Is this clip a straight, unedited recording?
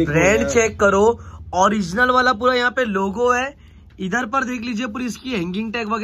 yes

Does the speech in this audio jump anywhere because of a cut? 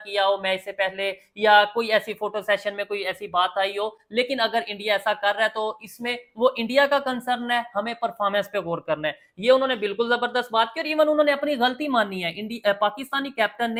no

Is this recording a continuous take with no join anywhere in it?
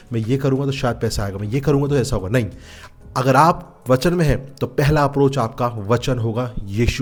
yes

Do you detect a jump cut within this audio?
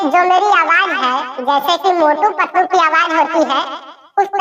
no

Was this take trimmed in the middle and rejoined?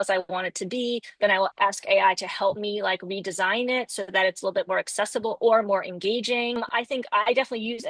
yes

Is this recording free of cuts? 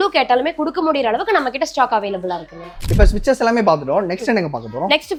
yes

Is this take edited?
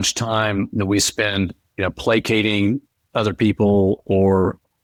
no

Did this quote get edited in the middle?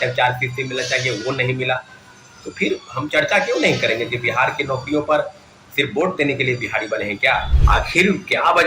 yes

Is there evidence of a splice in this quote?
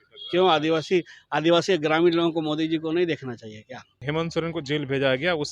yes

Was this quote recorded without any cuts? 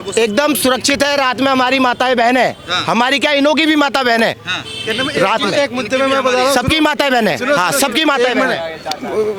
yes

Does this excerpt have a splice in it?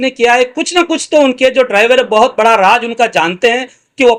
no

